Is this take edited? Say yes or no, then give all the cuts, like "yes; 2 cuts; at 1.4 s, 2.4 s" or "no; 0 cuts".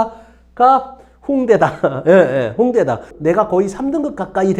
yes; 1 cut; at 3.1 s